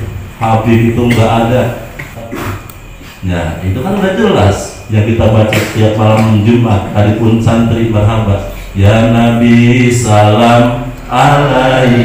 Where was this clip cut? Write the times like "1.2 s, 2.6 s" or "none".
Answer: 2.3 s